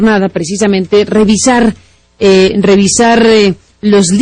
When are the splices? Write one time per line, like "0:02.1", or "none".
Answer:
0:02.5